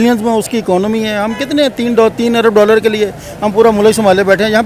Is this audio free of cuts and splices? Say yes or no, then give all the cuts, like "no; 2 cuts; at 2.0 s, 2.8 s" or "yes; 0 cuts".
yes; 0 cuts